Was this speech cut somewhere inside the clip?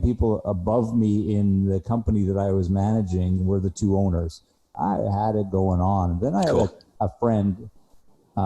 yes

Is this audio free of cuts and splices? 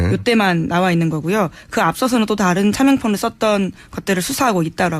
no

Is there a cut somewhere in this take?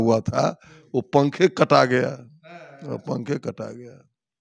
no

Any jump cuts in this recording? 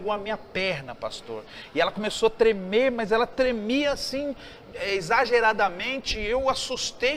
no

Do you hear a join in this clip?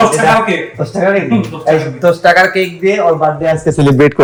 no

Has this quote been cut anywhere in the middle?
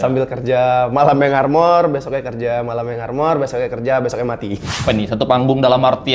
yes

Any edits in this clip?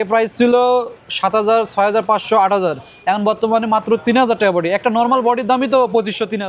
no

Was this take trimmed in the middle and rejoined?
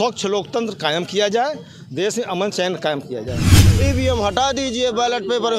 yes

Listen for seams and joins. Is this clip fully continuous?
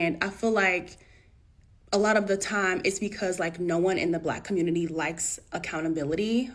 yes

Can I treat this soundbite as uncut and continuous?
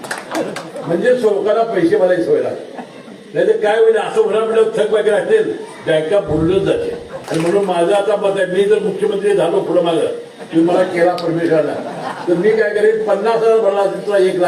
no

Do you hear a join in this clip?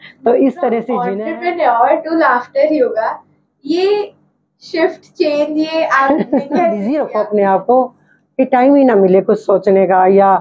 yes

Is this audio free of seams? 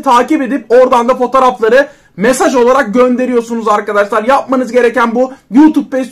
yes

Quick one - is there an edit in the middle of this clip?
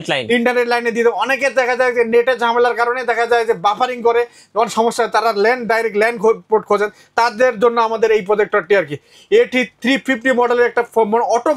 no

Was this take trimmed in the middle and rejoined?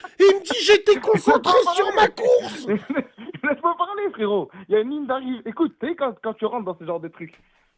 no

